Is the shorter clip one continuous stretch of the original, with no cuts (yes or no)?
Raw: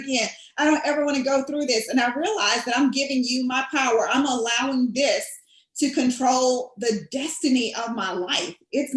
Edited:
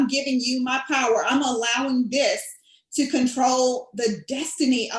yes